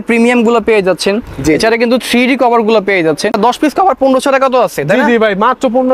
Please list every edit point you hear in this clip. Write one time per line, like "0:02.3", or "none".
0:03.3